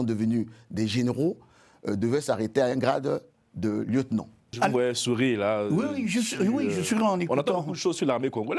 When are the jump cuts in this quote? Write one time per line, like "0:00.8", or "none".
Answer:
0:04.6